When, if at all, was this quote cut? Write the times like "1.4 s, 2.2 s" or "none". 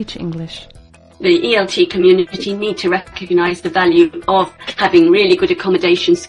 1.0 s